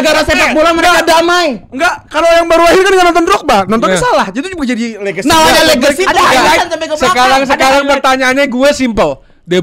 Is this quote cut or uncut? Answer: uncut